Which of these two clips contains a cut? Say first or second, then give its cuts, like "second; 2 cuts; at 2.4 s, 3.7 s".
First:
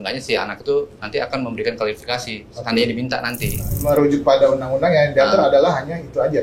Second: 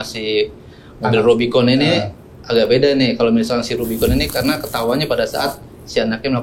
first; 1 cut; at 3.7 s